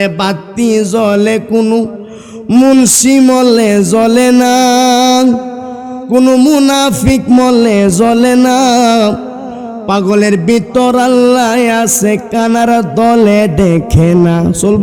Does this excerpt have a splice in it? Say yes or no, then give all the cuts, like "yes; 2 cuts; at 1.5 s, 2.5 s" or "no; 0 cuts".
no; 0 cuts